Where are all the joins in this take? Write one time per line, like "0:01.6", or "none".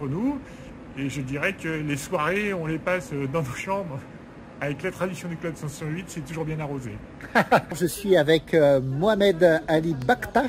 0:07.8